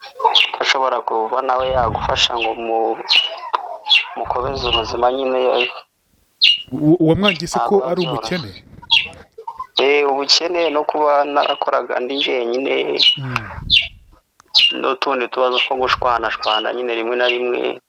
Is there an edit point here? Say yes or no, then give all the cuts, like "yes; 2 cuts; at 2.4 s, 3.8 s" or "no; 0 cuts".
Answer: no; 0 cuts